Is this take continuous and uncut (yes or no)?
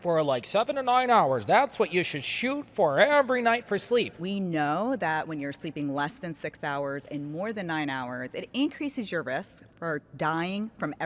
no